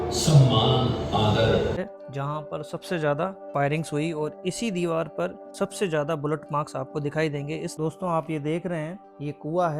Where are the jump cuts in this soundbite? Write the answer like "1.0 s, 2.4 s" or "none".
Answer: 1.8 s, 7.7 s